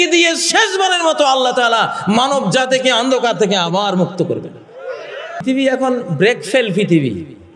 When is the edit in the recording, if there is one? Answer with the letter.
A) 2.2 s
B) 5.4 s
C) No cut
B